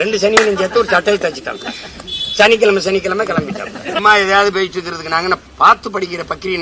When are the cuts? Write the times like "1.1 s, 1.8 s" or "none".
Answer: 4.0 s, 5.5 s